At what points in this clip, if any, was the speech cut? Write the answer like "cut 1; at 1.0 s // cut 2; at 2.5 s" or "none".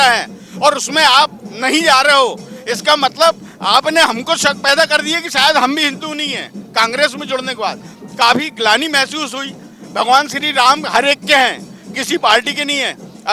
none